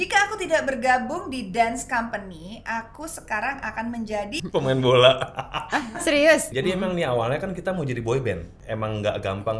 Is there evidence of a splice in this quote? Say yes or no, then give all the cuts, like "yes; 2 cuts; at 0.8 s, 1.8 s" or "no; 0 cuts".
yes; 3 cuts; at 4.4 s, 6.5 s, 8.6 s